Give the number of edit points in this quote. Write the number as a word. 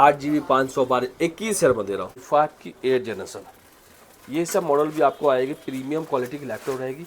one